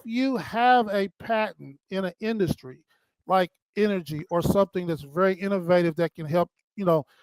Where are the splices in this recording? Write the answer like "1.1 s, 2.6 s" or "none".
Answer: none